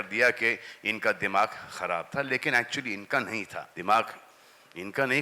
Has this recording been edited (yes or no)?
yes